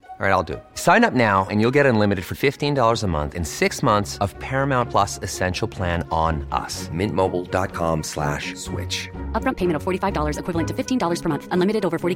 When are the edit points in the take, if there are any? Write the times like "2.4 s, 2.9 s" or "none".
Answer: none